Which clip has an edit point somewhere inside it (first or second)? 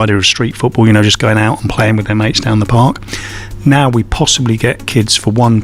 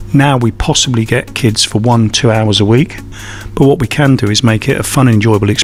second